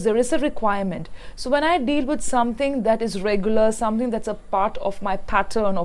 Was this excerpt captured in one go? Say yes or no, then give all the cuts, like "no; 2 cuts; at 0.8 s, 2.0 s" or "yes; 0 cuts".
yes; 0 cuts